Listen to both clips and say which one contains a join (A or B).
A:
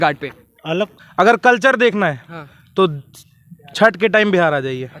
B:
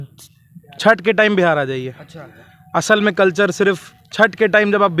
A